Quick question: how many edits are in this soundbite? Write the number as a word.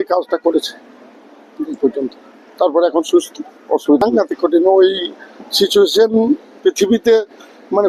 one